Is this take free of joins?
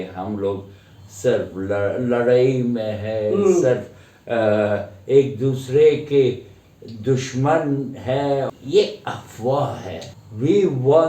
no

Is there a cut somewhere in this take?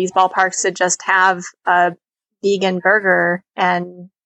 no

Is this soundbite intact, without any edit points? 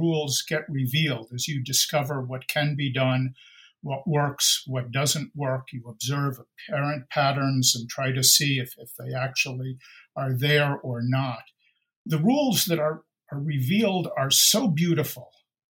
no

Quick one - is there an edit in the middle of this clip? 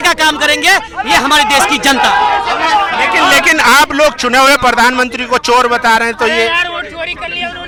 no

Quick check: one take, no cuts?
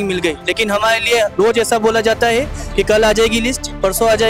yes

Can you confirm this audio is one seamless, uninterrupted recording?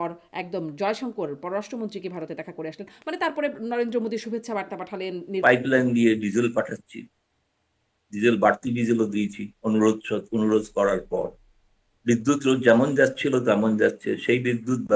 no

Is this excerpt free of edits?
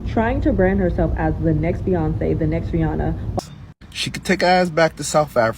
no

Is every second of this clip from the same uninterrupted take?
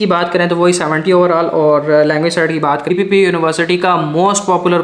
no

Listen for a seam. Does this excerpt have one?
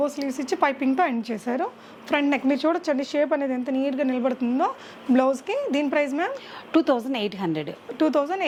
no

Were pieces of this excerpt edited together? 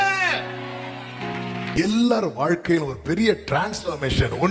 yes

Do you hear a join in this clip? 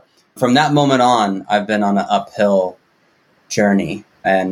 no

